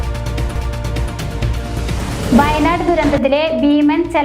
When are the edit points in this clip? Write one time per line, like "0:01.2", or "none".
0:01.5